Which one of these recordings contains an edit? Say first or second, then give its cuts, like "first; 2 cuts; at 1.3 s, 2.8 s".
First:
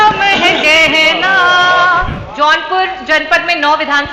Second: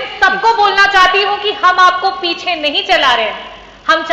first; 1 cut; at 2.2 s